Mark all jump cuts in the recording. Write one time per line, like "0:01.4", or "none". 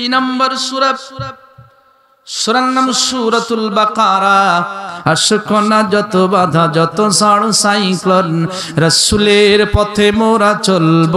0:04.9